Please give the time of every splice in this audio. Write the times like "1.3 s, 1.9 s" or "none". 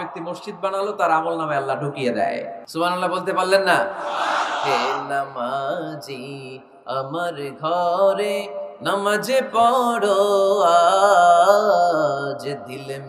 2.6 s